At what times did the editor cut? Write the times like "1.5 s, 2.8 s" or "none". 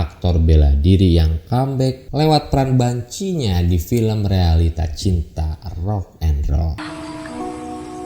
2.0 s, 6.8 s